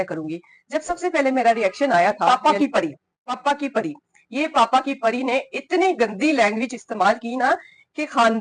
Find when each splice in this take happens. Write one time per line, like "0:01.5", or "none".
0:02.2